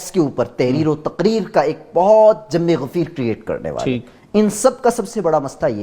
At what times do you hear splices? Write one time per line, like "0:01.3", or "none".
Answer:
none